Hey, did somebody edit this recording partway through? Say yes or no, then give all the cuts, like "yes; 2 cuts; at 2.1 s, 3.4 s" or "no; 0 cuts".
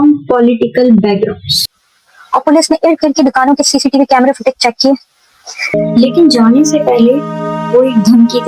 yes; 2 cuts; at 1.6 s, 5.7 s